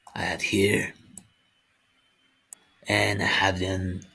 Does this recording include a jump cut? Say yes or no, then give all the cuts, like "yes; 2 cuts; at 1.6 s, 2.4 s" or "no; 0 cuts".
yes; 1 cut; at 2.5 s